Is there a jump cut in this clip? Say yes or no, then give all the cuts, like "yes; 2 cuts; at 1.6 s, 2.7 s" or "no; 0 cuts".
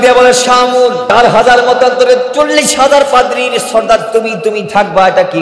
yes; 1 cut; at 1.1 s